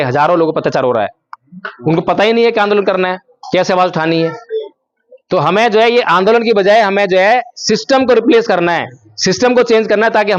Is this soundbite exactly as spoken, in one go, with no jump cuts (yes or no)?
yes